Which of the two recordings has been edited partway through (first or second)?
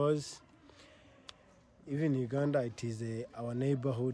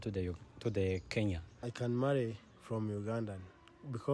second